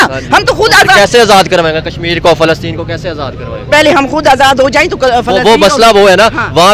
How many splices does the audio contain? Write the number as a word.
zero